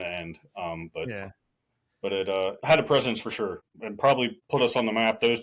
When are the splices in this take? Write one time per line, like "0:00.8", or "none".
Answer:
0:02.6
0:03.6
0:04.4

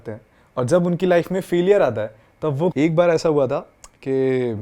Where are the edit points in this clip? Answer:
0:02.7

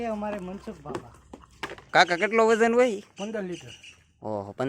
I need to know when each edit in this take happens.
0:01.9

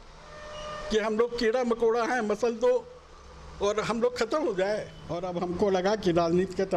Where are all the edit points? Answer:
0:05.3

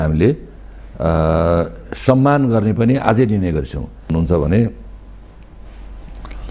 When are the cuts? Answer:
0:04.1

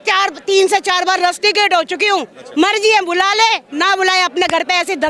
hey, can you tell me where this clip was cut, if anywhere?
none

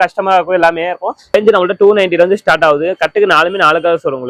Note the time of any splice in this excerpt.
0:01.3

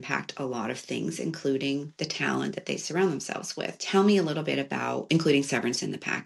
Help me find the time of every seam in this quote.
0:02.0
0:03.8
0:05.0

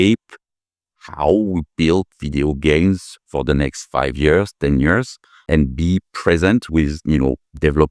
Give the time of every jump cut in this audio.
0:05.5

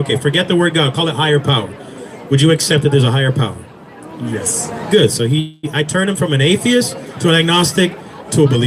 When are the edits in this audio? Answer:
none

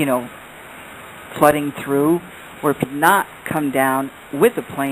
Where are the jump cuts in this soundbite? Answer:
none

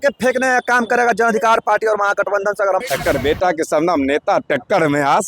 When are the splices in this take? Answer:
0:02.8

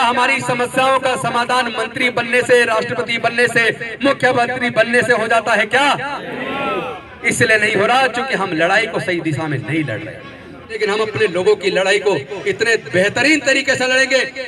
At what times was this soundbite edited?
0:10.8

